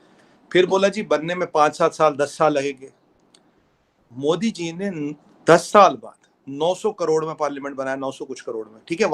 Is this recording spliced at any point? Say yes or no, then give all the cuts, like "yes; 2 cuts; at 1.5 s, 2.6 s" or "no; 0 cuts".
no; 0 cuts